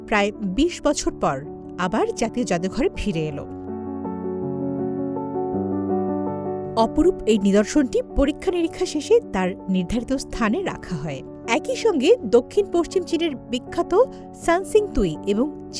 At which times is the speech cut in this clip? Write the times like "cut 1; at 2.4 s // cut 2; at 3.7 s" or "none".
none